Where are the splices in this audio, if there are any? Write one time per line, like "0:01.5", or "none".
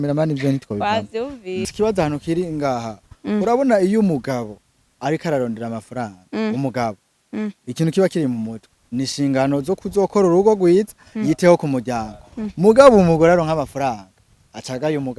0:01.7